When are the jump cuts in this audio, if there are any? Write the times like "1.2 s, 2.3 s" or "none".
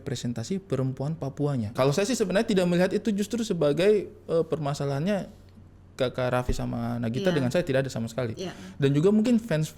1.7 s